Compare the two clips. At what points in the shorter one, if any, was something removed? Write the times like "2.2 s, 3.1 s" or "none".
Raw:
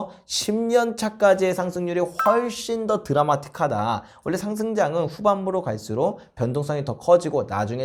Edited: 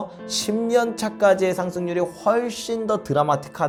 none